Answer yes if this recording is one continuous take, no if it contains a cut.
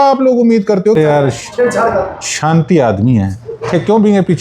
no